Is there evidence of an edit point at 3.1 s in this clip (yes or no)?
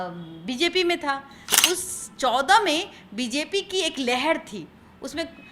no